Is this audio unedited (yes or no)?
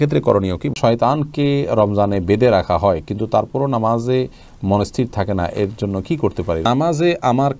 no